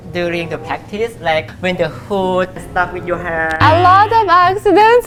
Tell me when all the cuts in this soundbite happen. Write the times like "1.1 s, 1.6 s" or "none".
none